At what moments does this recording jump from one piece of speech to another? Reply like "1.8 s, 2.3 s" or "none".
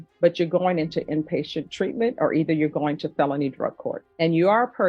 3.9 s